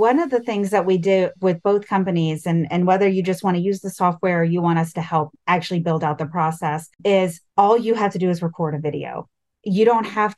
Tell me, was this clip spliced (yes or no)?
no